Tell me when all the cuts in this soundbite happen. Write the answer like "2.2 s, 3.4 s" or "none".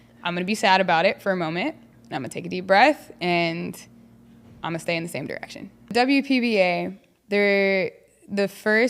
5.9 s